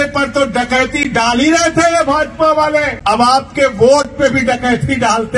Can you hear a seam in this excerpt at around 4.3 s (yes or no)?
no